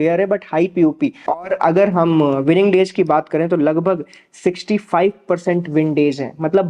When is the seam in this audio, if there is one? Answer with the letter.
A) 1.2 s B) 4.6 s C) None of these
A